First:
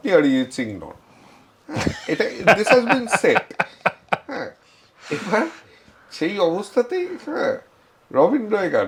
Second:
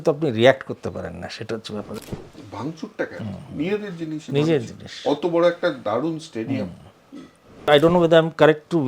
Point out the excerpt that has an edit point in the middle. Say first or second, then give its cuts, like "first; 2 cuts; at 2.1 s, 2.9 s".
second; 2 cuts; at 2.0 s, 7.7 s